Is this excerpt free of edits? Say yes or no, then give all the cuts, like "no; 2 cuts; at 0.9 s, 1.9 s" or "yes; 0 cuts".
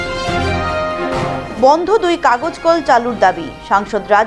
yes; 0 cuts